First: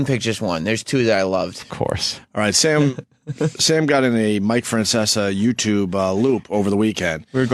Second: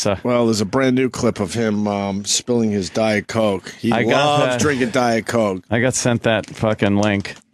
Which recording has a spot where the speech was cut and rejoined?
first; 1 cut; at 6.6 s

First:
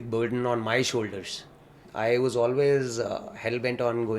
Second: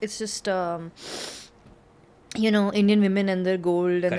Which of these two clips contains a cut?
first; 1 cut; at 1.8 s

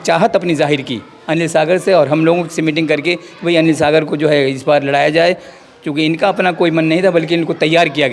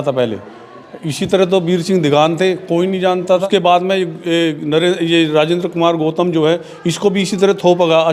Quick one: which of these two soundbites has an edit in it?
second; 1 cut; at 3.4 s

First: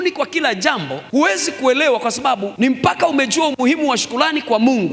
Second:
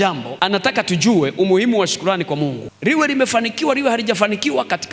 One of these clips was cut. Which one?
first; 2 cuts; at 0.9 s, 2.5 s

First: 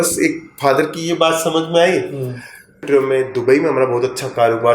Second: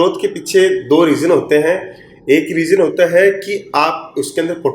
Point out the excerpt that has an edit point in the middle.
first; 1 cut; at 2.8 s

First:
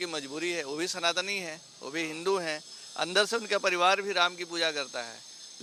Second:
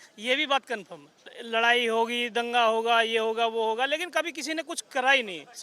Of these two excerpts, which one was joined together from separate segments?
second; 1 cut; at 1.3 s

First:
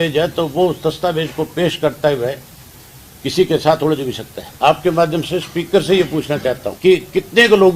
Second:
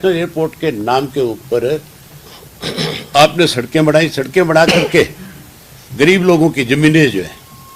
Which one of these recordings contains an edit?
first; 2 cuts; at 4.4 s, 6.7 s

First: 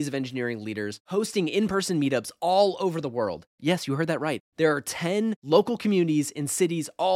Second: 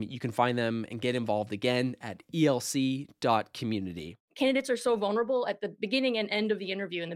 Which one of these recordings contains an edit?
second; 1 cut; at 4.1 s

